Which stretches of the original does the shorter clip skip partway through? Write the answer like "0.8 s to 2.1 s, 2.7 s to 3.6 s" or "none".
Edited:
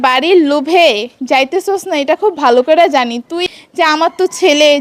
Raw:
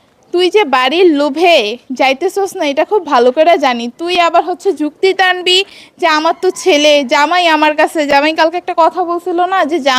4.1 s to 5.7 s